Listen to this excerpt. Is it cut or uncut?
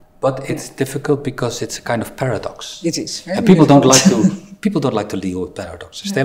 uncut